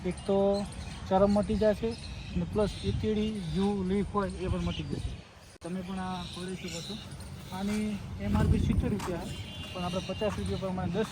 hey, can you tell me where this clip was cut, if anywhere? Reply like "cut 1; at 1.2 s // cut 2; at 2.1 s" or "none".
none